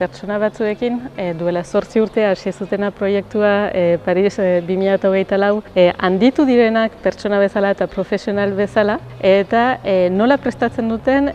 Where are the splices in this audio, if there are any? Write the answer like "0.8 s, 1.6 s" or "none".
5.7 s, 9.1 s